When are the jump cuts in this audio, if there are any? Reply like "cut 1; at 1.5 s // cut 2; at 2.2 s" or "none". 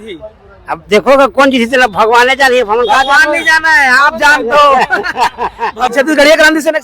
cut 1; at 5.9 s